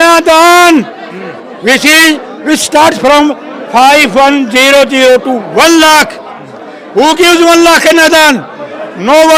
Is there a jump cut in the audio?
no; 0 cuts

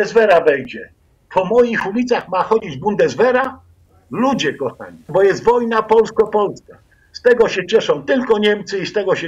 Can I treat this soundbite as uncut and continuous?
no; 1 cut; at 5.1 s

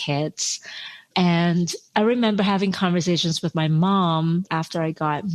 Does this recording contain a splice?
yes; 2 cuts; at 3.5 s, 4.5 s

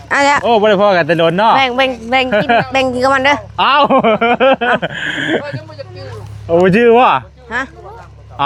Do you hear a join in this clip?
no; 0 cuts

